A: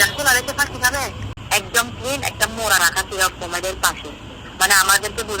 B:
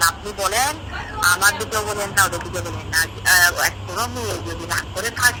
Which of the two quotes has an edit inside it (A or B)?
A